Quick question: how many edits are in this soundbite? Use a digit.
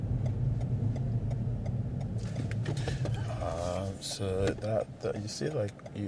0